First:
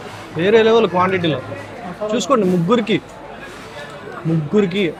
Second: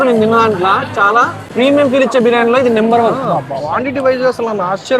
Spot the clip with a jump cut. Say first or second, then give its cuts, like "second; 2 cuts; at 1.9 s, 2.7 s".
second; 2 cuts; at 1.4 s, 3.2 s